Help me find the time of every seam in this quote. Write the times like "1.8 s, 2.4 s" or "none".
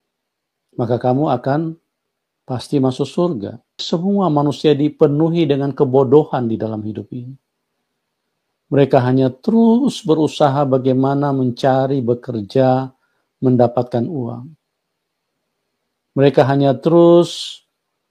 3.8 s